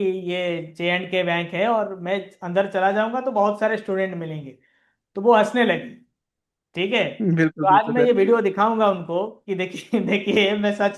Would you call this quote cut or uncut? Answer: uncut